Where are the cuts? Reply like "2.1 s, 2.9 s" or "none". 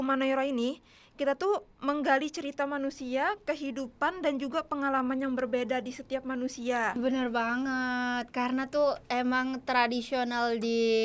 7.0 s